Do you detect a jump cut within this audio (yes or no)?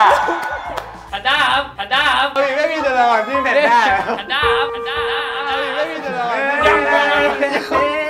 yes